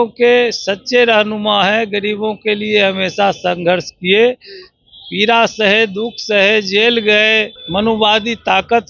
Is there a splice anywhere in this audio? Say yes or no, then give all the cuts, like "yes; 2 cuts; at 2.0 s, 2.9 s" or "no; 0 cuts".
yes; 1 cut; at 7.6 s